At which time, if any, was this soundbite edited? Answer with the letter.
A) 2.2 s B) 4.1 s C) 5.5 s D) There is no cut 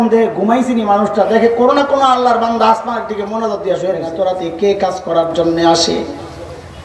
B